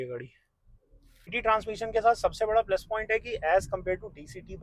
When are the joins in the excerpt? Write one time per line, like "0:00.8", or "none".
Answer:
0:01.4